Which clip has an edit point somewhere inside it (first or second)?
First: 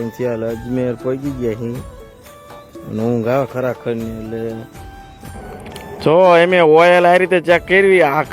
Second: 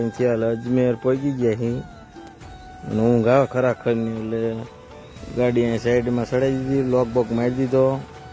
first